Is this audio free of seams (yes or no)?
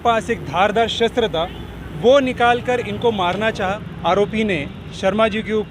no